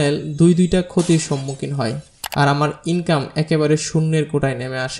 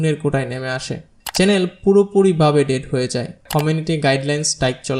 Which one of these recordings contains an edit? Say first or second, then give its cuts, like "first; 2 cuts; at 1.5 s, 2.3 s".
second; 1 cut; at 3.4 s